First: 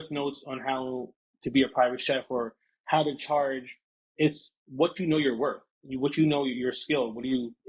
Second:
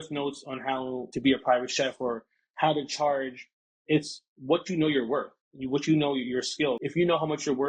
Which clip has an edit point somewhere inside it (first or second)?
second